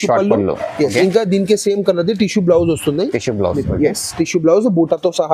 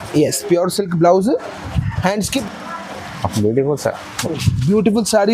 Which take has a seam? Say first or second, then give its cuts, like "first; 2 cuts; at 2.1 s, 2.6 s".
second; 1 cut; at 2.4 s